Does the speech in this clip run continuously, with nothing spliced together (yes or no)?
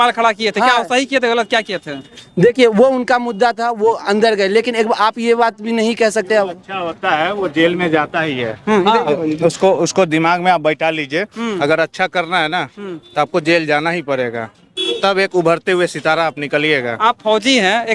yes